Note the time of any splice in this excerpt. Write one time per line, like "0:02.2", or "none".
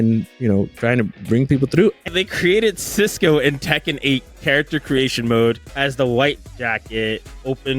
0:02.1
0:05.7